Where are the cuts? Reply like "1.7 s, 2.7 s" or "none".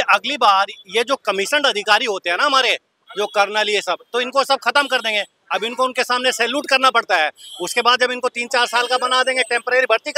none